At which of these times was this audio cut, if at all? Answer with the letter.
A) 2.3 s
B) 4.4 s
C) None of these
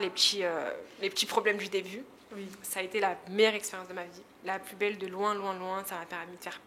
C